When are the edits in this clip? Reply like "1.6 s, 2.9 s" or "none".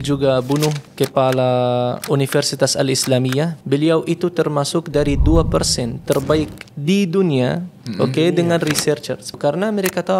0.9 s, 2.0 s, 3.6 s, 9.4 s